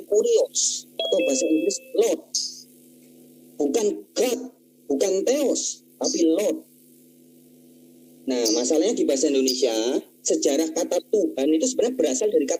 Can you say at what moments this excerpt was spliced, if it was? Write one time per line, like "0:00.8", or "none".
none